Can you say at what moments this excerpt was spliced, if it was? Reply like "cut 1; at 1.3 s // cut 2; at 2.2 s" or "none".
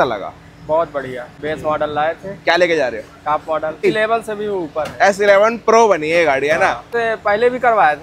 cut 1; at 1.3 s // cut 2; at 3.9 s // cut 3; at 6.9 s